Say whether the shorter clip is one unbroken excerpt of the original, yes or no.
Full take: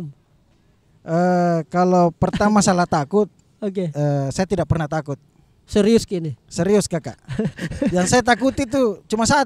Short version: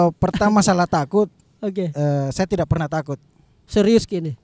yes